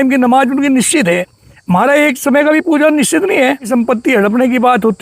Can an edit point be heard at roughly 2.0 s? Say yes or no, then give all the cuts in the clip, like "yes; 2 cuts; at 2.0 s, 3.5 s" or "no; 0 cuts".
no; 1 cut; at 3.7 s